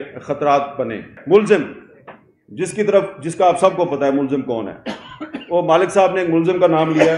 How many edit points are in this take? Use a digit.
1